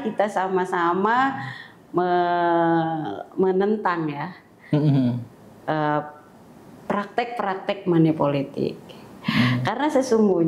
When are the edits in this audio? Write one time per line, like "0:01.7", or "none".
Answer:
none